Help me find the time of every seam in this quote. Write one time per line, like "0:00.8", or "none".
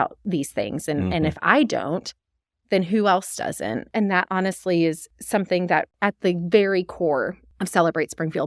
0:05.9